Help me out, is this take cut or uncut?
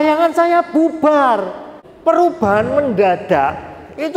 uncut